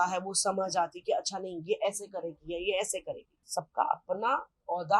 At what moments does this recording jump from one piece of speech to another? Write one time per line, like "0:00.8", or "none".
0:03.4